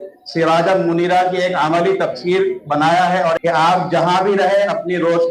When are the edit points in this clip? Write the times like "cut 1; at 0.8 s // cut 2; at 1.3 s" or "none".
cut 1; at 3.4 s